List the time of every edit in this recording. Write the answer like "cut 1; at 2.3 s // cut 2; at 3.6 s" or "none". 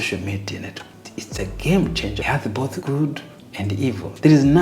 cut 1; at 1.0 s // cut 2; at 2.3 s